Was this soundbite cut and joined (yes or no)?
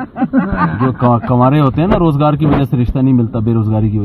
no